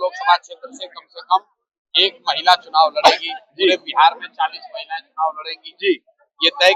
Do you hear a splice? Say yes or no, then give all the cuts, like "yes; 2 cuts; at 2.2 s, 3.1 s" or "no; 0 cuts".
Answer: no; 0 cuts